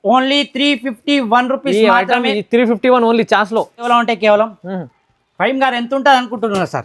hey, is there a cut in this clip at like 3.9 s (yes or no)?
yes